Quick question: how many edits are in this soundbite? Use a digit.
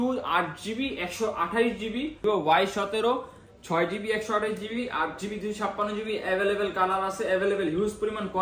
1